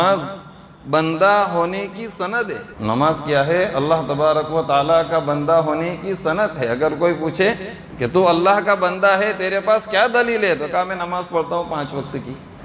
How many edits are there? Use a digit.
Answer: 0